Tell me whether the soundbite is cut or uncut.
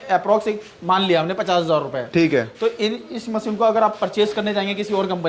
uncut